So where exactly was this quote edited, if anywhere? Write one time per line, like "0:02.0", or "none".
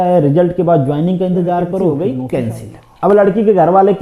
0:01.9